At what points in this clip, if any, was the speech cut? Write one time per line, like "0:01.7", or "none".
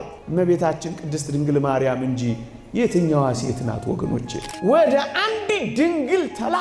0:04.4